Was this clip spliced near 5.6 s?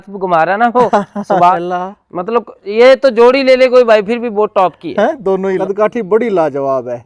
yes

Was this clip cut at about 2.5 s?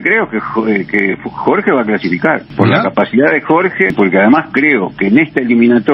yes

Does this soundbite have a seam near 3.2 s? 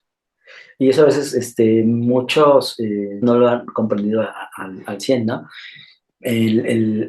yes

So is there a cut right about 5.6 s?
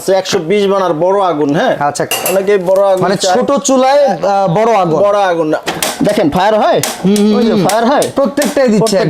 yes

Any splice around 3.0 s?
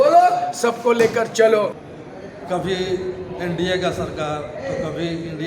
no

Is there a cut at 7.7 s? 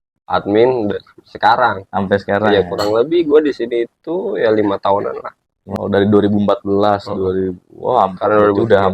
no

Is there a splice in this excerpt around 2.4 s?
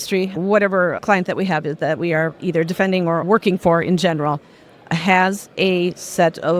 yes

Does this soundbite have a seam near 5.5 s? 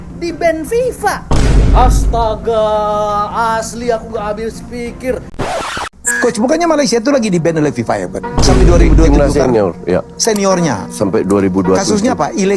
yes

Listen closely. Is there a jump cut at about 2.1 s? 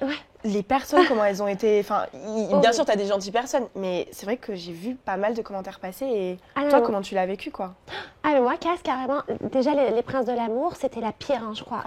no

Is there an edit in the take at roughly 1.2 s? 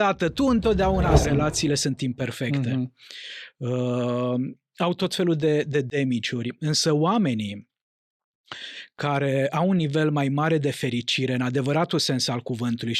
yes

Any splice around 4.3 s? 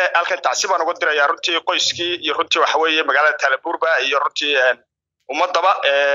no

